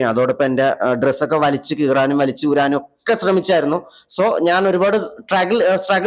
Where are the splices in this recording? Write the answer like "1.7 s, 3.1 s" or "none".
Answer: none